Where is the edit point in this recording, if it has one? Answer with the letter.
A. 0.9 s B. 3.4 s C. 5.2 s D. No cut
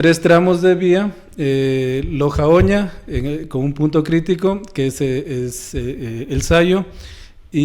D